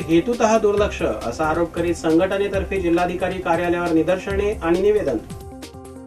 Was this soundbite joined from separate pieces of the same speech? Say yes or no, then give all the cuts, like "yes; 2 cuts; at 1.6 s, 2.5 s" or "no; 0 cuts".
no; 0 cuts